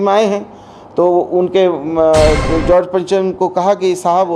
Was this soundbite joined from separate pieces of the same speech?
no; 0 cuts

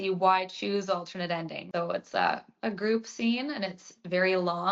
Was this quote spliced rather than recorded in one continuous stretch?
yes; 1 cut; at 1.6 s

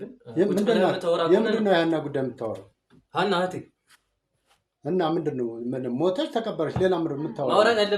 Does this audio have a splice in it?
no; 0 cuts

